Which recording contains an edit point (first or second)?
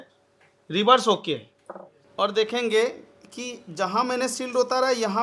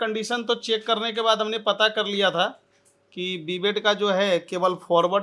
first